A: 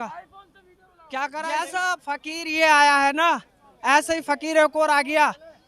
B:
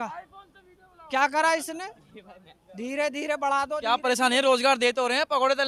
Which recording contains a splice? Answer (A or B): A